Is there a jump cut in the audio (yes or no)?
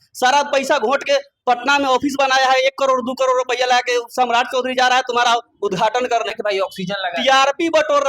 yes